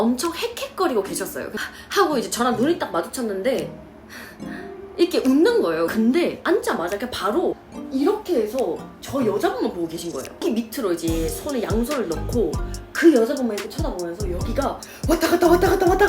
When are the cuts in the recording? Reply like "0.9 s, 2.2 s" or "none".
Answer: 1.5 s, 5.9 s, 10.4 s